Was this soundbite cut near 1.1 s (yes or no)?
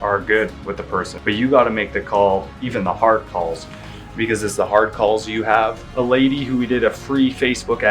yes